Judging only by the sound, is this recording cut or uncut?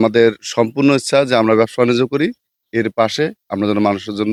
uncut